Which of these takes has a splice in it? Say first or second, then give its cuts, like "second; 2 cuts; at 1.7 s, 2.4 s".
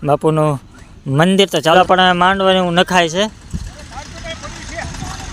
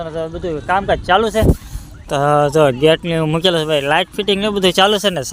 first; 1 cut; at 1.7 s